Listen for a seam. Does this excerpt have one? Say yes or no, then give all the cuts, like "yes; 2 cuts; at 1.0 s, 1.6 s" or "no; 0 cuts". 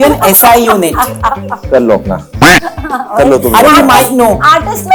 no; 0 cuts